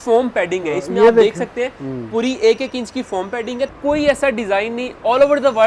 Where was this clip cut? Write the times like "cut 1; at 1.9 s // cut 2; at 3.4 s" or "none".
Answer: cut 1; at 3.7 s